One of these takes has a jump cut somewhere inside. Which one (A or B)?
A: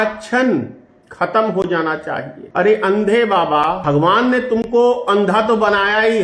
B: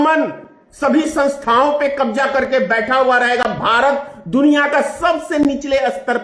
A